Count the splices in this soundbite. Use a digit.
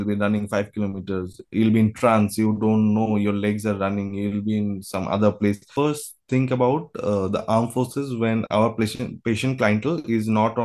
1